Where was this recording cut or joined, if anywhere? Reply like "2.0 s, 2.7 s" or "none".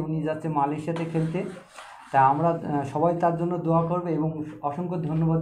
none